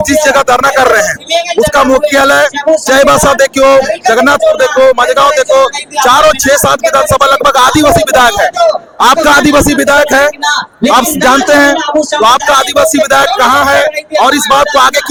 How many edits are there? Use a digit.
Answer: 0